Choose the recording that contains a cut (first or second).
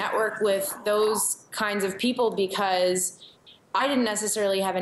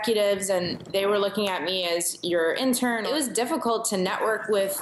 second